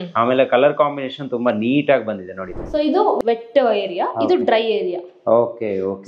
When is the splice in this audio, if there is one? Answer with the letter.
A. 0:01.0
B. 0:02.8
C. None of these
B